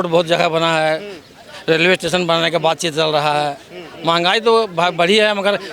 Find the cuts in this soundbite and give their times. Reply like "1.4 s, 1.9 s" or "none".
none